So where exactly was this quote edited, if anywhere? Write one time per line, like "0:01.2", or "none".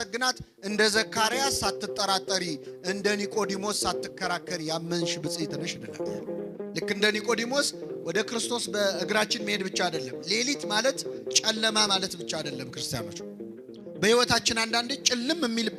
0:06.2